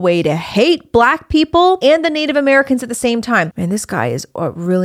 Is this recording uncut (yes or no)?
no